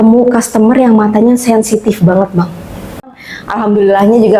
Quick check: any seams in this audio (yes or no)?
yes